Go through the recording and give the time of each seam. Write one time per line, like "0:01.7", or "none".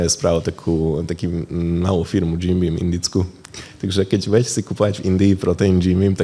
none